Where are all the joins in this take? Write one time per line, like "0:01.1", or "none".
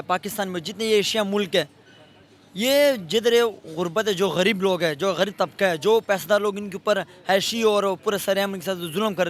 none